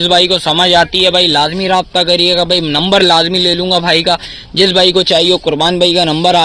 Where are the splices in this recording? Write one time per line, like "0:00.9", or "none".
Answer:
none